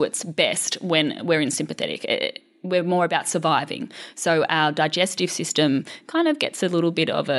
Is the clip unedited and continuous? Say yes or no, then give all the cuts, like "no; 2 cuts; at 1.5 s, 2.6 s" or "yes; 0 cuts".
yes; 0 cuts